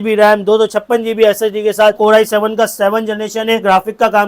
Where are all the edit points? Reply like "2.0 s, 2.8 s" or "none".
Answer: 2.0 s

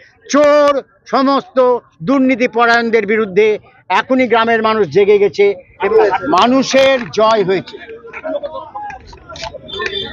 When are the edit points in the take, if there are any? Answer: 5.7 s

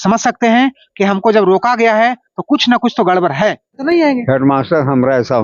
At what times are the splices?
3.8 s

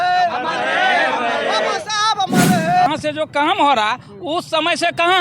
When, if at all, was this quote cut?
2.9 s

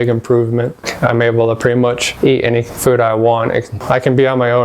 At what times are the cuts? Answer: 0.9 s, 2.1 s, 3.8 s

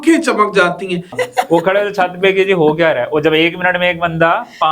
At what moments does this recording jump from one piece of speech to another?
1.2 s

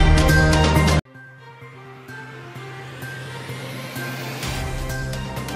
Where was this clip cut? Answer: 1.2 s

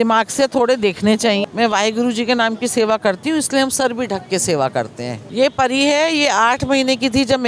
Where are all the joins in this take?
1.5 s, 5.2 s

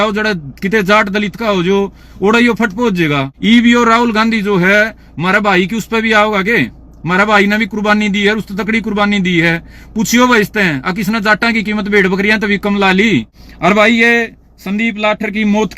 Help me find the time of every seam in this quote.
13.4 s

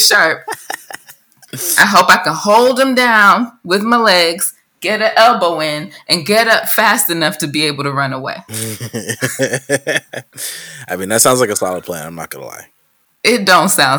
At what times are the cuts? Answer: none

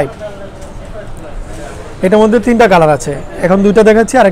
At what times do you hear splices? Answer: none

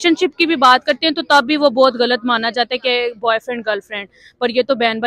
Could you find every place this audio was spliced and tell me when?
none

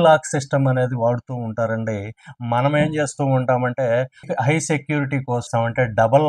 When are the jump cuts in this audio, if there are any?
none

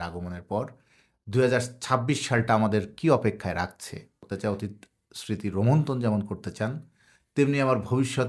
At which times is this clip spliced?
4.2 s

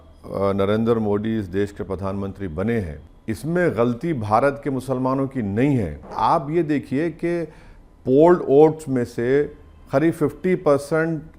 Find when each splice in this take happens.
3.0 s, 6.1 s

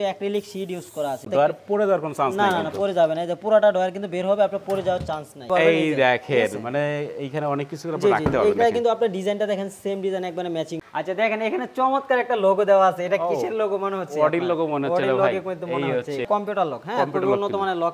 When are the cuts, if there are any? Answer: 1.3 s, 5.4 s, 10.9 s, 16.2 s

